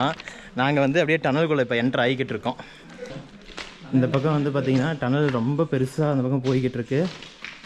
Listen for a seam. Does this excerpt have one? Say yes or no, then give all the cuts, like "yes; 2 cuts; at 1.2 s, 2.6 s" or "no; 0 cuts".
yes; 1 cut; at 3.1 s